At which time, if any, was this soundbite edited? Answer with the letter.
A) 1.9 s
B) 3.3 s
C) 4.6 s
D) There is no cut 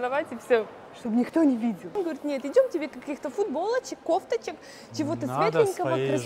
A